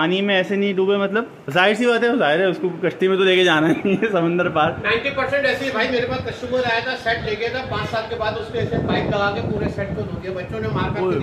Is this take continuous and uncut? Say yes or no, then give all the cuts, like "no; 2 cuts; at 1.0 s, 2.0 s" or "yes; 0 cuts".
yes; 0 cuts